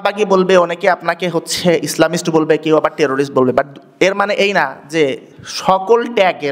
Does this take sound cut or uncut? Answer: uncut